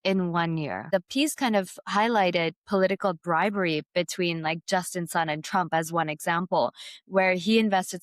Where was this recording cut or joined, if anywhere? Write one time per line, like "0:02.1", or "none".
0:00.9